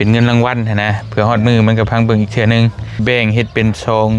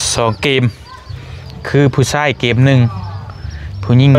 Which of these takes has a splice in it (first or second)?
first